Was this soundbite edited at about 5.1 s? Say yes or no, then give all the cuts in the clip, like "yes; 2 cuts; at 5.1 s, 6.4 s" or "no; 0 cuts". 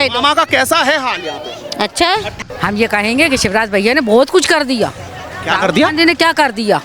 no; 1 cut; at 2.3 s